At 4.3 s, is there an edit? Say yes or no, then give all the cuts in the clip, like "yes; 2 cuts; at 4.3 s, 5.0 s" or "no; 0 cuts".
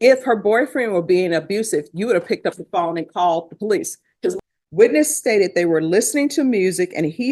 yes; 1 cut; at 4.3 s